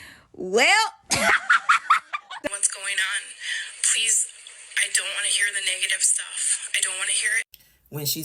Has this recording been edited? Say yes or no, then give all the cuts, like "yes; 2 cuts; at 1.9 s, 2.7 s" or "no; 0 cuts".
yes; 1 cut; at 2.5 s